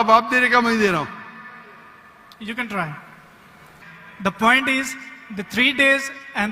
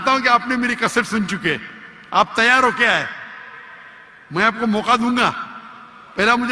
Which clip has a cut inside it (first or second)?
first